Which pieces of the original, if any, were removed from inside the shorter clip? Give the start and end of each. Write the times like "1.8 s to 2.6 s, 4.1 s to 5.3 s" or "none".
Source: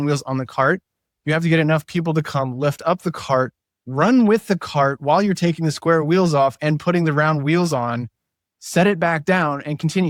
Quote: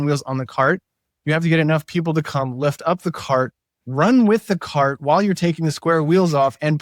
none